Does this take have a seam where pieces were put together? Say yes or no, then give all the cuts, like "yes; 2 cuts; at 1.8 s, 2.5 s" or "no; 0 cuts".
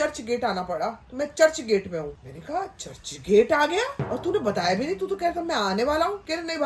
no; 0 cuts